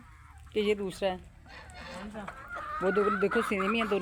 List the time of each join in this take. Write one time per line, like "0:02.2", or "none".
none